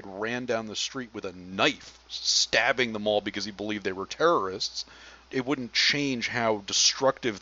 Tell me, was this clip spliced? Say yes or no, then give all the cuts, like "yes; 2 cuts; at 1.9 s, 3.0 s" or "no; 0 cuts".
yes; 1 cut; at 5.2 s